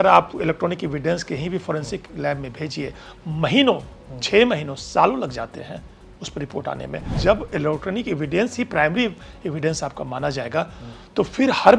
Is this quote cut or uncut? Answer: cut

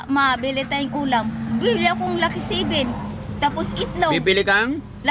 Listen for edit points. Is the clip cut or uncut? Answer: uncut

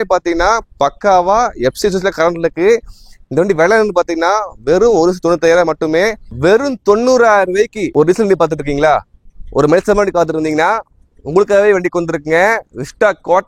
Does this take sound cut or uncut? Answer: cut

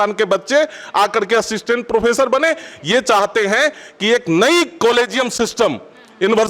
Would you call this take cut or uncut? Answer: uncut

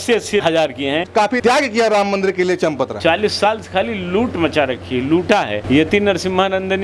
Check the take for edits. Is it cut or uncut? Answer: cut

